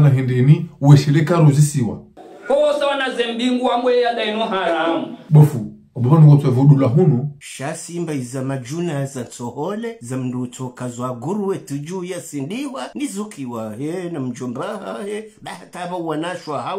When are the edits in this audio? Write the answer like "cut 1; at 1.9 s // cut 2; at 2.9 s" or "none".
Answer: none